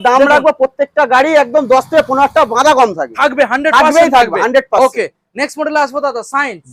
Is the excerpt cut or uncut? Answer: uncut